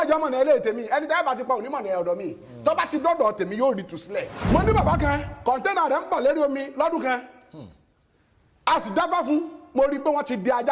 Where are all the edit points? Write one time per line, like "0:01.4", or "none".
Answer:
0:04.4